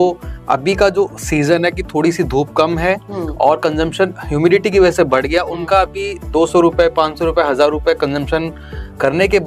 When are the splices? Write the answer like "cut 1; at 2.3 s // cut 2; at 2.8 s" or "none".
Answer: none